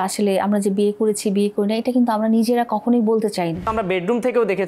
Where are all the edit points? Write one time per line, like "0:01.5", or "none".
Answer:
0:03.7

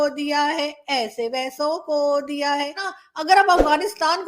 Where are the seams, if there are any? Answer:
0:02.9

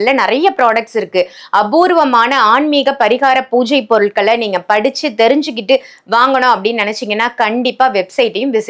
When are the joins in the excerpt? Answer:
none

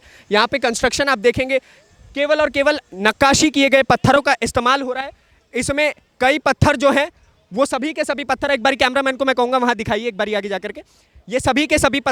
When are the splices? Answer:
none

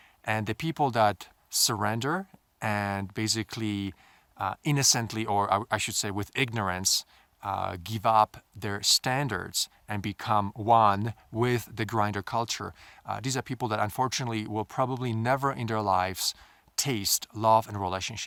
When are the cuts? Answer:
none

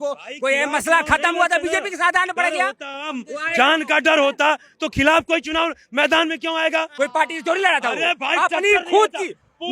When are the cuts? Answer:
0:06.9

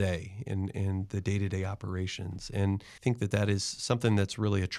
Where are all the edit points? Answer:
0:02.9

